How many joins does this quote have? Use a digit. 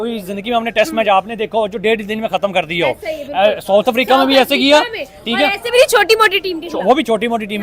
0